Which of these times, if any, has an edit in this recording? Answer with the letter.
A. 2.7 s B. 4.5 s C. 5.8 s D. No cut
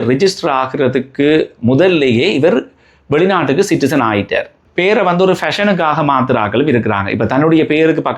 B